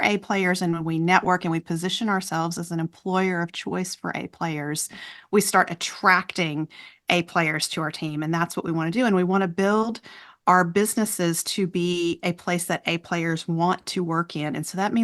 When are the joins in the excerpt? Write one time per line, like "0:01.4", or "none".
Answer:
none